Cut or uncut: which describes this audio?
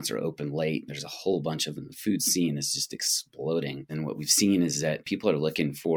cut